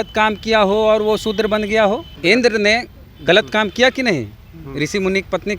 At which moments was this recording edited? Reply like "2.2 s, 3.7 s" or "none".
2.1 s